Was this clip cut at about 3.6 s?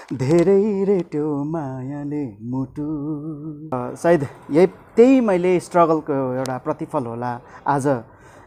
yes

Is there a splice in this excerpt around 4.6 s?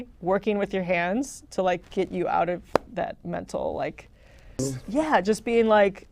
yes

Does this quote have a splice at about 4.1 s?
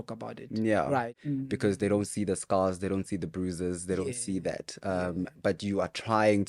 no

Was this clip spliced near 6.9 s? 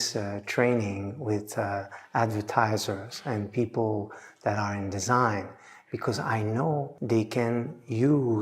yes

